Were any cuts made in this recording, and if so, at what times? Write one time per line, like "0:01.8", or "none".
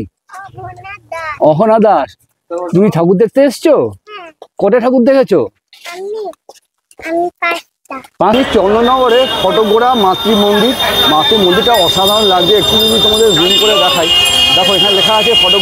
0:08.3